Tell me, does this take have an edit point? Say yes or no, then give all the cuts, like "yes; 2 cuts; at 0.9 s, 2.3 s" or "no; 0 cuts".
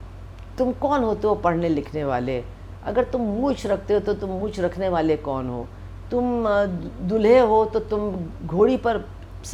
no; 0 cuts